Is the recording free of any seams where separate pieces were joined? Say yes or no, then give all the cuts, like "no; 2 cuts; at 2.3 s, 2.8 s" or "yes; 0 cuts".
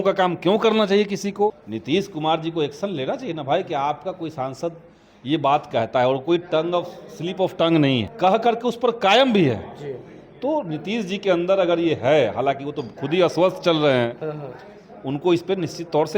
no; 2 cuts; at 1.6 s, 8.1 s